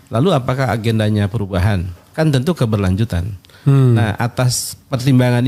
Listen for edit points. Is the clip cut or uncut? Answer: uncut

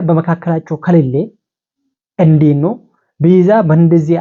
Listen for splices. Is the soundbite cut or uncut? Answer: uncut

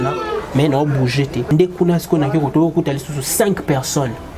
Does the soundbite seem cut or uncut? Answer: cut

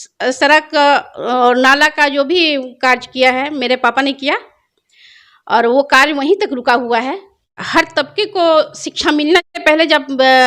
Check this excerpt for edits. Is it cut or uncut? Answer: cut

